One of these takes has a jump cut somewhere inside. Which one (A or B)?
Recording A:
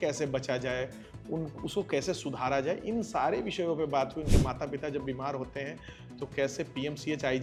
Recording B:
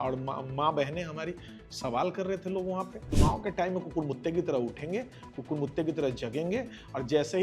B